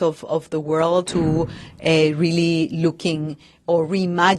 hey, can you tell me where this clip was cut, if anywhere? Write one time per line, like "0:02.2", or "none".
0:01.1